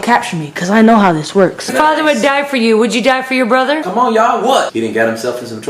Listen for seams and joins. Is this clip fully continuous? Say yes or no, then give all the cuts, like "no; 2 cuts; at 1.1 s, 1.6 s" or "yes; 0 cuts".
no; 3 cuts; at 1.7 s, 3.8 s, 4.7 s